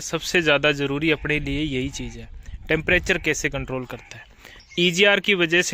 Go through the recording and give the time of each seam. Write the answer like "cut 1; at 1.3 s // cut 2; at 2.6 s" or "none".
cut 1; at 4.6 s